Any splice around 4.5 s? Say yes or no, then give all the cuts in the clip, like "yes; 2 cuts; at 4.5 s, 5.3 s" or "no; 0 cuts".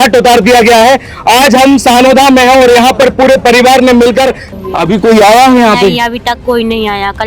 yes; 1 cut; at 4.5 s